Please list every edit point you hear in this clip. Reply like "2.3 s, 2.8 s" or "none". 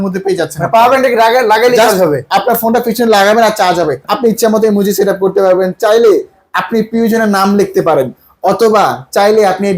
4.0 s